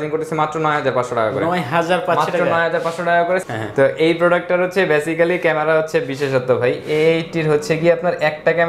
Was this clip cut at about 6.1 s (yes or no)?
no